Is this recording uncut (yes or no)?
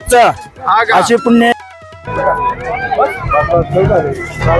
no